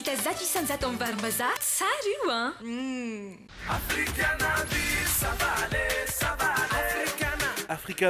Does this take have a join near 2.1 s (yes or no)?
no